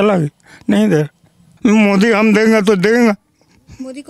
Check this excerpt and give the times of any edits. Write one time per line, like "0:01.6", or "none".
0:01.5

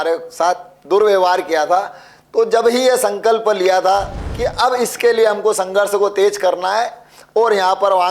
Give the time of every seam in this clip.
0:04.2

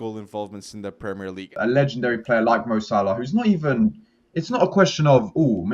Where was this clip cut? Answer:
0:01.5

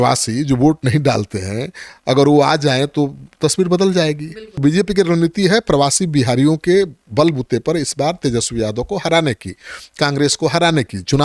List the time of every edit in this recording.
0:04.6

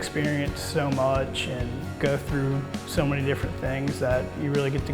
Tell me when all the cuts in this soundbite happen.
none

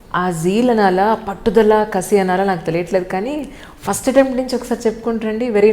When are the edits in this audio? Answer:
none

